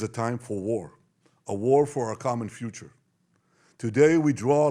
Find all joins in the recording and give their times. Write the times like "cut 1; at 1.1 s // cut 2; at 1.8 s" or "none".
none